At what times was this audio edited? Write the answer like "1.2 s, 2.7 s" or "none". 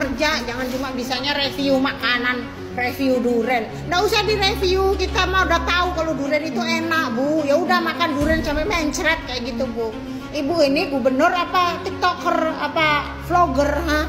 none